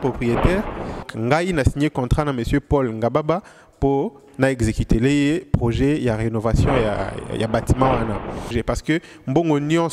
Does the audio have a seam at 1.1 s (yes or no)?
yes